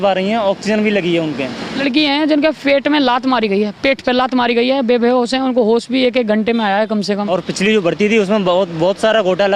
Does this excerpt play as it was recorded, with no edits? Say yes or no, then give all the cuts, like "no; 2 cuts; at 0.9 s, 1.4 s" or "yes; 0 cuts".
no; 2 cuts; at 1.8 s, 7.2 s